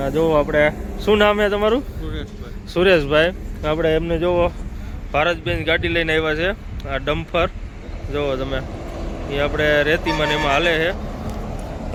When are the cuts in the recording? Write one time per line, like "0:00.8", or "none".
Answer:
none